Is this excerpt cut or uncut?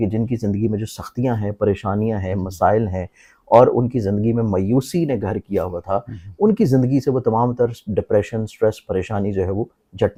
uncut